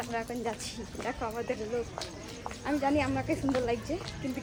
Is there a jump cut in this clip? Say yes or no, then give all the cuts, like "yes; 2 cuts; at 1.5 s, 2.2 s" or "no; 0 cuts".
no; 0 cuts